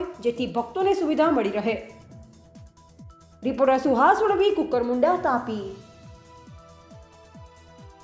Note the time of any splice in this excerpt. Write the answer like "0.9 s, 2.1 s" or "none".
2.0 s, 3.4 s, 5.8 s

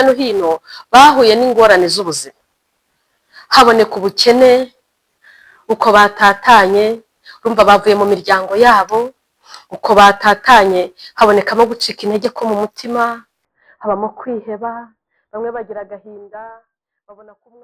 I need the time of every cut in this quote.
none

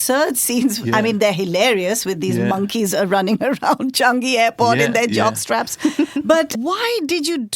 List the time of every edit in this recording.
6.5 s

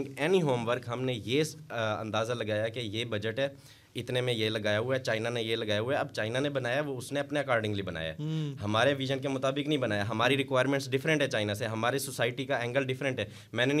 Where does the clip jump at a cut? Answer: none

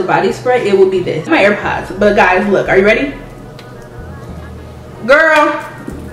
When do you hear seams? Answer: 1.3 s

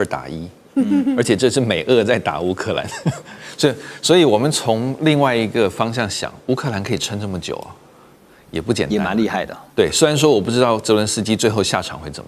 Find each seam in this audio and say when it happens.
none

